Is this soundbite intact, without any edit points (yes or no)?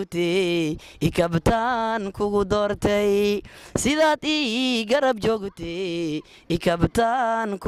yes